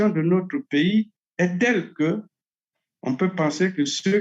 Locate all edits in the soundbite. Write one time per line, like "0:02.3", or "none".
0:01.2

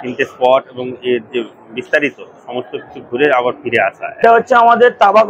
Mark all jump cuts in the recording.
0:04.2

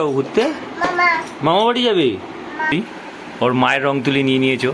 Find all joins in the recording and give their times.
0:02.7

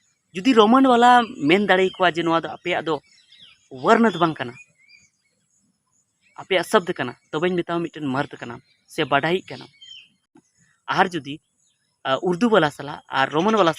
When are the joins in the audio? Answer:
0:10.2

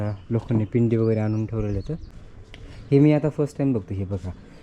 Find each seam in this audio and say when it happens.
0:02.1

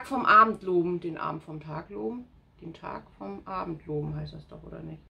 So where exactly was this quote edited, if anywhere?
none

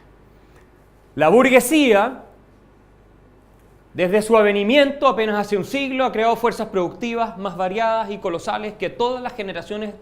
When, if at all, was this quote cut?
0:01.9

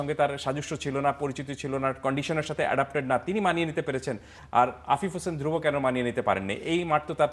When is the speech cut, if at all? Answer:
none

